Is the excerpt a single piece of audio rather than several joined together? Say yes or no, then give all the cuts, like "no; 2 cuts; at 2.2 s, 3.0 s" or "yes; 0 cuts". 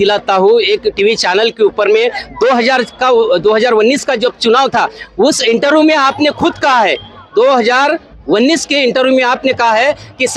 yes; 0 cuts